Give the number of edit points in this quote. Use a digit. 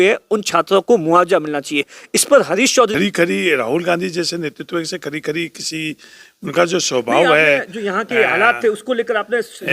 1